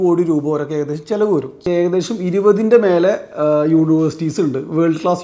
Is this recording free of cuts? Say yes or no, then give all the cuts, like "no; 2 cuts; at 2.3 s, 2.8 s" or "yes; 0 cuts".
no; 1 cut; at 1.7 s